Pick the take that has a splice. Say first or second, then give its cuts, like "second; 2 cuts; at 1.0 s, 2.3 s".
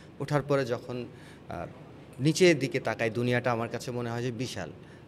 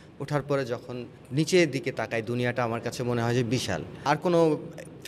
second; 2 cuts; at 1.2 s, 4.0 s